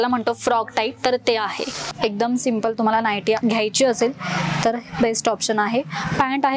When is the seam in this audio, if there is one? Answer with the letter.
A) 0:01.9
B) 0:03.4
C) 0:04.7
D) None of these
A